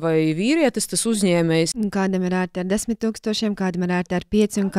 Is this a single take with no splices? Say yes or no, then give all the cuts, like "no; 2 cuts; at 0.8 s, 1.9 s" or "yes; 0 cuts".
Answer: no; 1 cut; at 1.7 s